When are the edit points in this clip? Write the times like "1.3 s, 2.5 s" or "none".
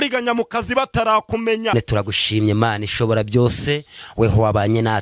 1.7 s